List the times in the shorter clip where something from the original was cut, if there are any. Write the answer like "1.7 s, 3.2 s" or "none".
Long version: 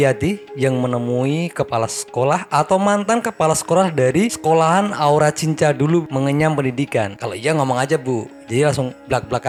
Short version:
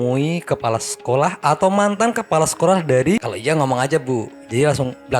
3.3 s